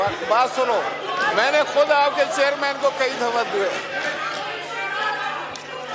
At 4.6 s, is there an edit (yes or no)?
no